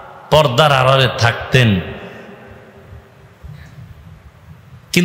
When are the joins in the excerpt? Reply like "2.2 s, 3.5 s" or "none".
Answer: none